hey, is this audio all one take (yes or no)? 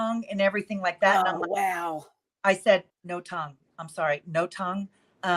no